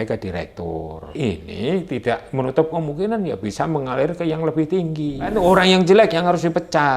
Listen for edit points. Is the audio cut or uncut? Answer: cut